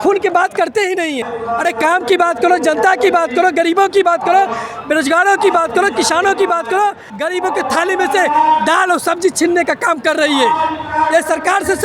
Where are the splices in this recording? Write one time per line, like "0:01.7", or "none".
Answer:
0:01.4
0:07.1